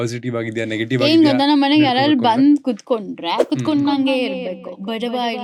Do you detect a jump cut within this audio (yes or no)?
no